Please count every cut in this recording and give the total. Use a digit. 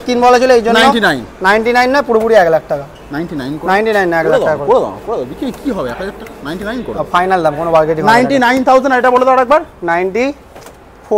0